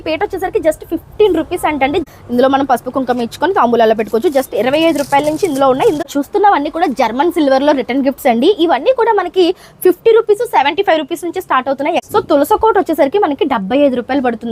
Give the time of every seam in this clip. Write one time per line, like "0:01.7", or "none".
0:02.0
0:06.0
0:12.0